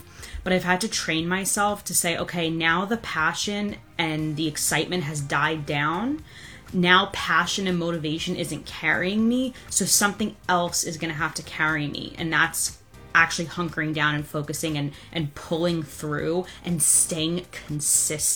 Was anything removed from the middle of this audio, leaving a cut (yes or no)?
no